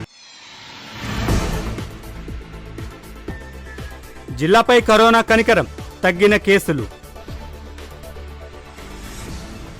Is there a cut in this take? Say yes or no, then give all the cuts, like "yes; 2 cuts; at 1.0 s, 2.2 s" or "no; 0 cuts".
yes; 1 cut; at 3.5 s